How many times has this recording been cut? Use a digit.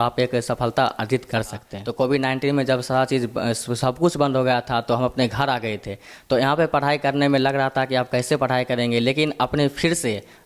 1